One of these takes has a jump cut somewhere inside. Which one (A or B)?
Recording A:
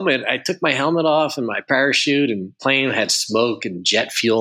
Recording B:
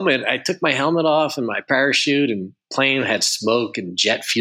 A